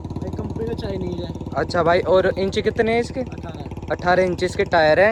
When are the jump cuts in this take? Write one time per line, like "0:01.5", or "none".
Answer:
none